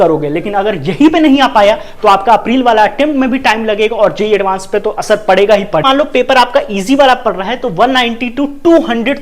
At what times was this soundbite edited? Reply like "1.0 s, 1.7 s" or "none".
5.8 s